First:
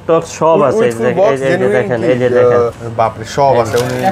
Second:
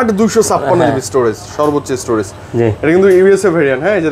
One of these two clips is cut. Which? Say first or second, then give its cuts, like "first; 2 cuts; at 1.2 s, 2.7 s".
first; 1 cut; at 2.8 s